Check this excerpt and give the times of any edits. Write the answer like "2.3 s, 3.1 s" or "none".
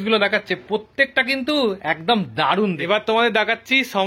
3.0 s

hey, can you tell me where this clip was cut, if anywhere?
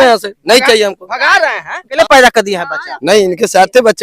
1.9 s

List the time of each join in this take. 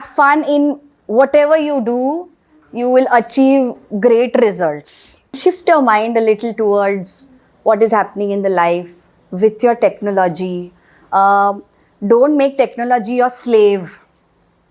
5.4 s

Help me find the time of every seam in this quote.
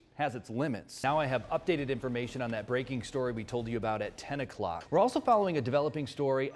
1.0 s, 4.8 s

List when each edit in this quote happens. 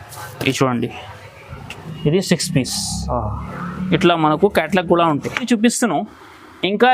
5.4 s

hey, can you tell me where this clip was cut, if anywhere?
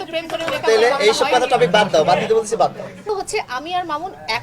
3.1 s

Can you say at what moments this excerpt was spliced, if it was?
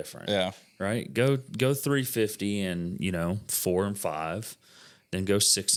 none

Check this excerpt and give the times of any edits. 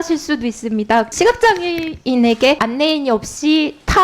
1.1 s, 2.6 s

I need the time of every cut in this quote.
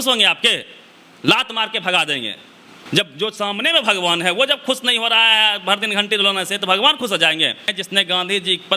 7.7 s

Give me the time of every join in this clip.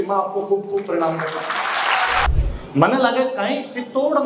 2.3 s

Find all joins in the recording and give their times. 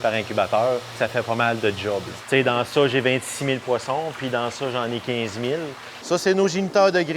1.0 s, 2.1 s, 5.9 s

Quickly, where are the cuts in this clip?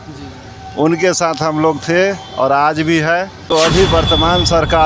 3.7 s

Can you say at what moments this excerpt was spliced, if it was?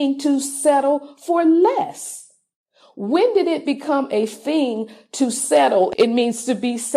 5.9 s

